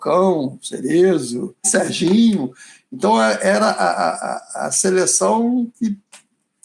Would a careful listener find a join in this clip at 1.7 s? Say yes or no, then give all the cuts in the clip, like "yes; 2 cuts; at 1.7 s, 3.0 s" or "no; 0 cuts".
yes; 1 cut; at 1.7 s